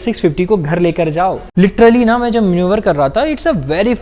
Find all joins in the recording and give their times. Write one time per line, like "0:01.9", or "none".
0:01.4